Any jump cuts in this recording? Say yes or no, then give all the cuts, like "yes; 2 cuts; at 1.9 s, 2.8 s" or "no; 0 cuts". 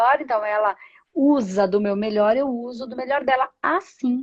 no; 0 cuts